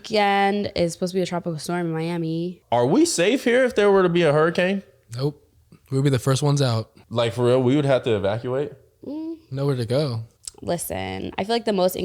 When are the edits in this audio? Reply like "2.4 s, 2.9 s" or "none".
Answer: 2.5 s, 6.9 s, 10.3 s